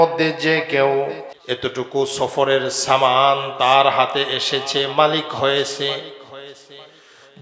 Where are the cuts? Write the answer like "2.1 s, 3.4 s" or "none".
1.3 s